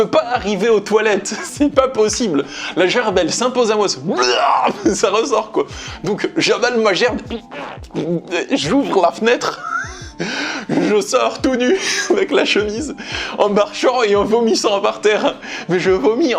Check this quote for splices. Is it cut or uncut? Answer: uncut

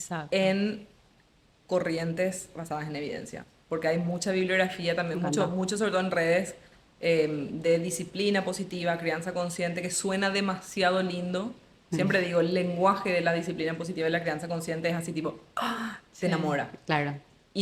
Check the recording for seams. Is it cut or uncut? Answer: uncut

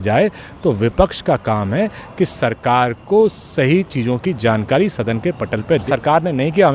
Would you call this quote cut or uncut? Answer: cut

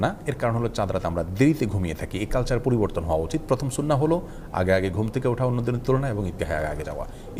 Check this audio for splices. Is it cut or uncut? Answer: uncut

